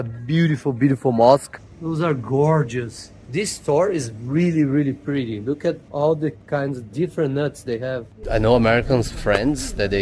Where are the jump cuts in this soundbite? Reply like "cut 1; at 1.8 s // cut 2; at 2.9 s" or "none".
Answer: cut 1; at 1.5 s // cut 2; at 8.1 s